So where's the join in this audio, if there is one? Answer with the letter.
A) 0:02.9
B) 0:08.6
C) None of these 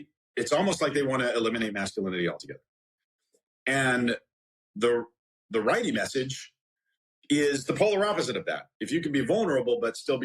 B